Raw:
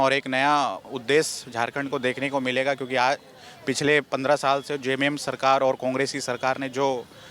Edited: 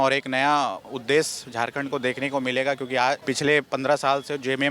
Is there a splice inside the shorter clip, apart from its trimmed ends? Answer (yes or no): yes